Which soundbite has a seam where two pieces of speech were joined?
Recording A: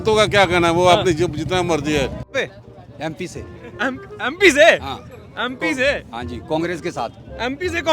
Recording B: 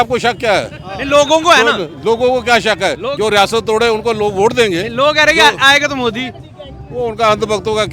A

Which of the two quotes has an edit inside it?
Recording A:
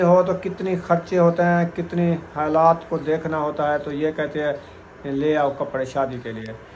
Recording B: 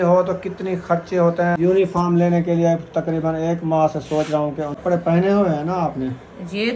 B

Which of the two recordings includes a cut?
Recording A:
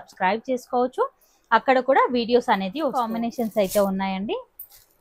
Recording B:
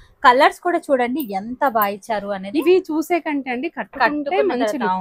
A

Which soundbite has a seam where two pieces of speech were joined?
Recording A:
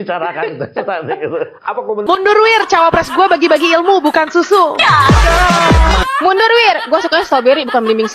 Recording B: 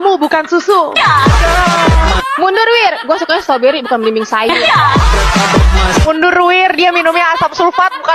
A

